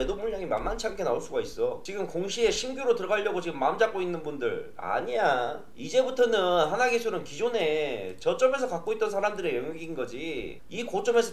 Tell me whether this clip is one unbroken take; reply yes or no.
no